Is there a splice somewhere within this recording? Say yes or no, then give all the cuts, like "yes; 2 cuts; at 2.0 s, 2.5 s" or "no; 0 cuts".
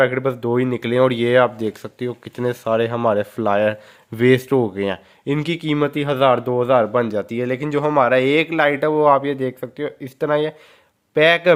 no; 0 cuts